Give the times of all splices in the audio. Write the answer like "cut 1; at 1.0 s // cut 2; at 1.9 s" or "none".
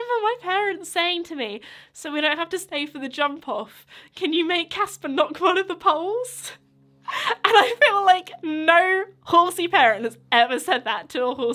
none